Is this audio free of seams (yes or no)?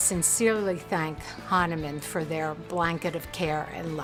yes